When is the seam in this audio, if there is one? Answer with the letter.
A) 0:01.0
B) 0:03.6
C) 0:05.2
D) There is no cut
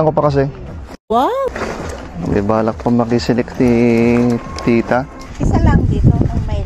C